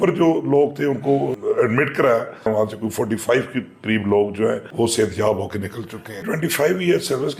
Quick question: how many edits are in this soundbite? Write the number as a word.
four